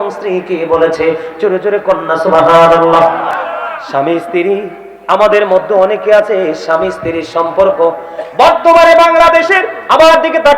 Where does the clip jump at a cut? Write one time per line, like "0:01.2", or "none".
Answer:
0:03.3